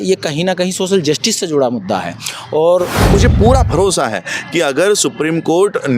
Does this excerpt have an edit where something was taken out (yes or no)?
yes